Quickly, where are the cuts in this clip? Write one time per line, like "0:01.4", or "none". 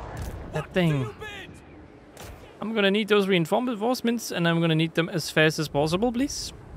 0:02.1